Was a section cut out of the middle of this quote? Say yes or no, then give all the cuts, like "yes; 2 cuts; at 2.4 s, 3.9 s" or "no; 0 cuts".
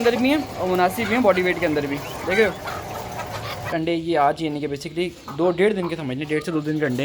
yes; 1 cut; at 3.7 s